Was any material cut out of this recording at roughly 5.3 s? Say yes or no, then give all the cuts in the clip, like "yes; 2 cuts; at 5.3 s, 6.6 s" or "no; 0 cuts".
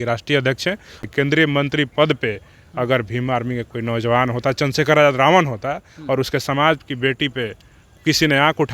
no; 1 cut; at 1.0 s